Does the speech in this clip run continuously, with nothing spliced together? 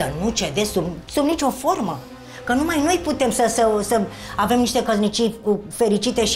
yes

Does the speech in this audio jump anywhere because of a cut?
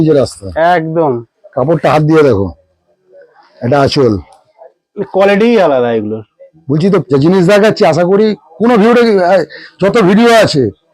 yes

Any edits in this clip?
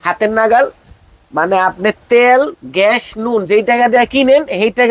no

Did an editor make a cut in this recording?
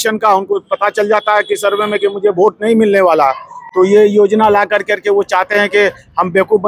no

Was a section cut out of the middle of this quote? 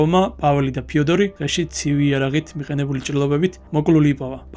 yes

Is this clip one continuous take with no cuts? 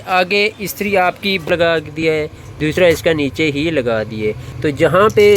no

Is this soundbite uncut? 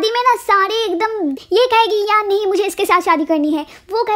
no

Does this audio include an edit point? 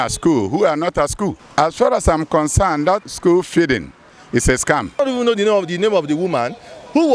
yes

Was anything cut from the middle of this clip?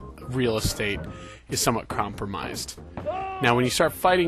yes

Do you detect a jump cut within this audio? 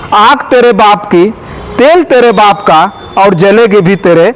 no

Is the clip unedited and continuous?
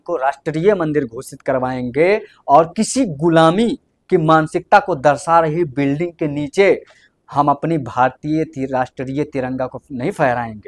yes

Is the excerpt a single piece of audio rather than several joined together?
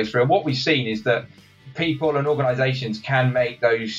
no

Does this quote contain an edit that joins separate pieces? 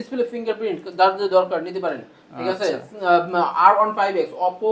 no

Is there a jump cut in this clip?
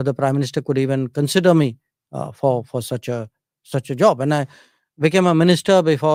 no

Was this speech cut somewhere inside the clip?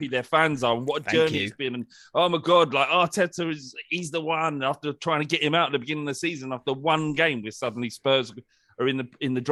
no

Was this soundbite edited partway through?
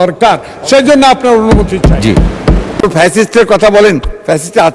yes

